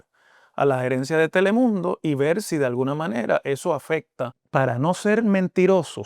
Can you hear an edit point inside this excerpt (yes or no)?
yes